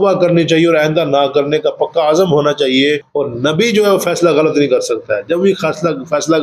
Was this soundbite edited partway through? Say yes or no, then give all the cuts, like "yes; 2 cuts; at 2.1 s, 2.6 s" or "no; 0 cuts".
yes; 1 cut; at 3.1 s